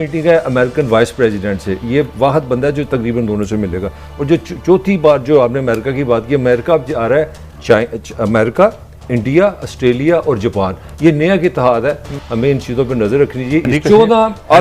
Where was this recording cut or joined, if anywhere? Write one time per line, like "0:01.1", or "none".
0:12.1
0:13.7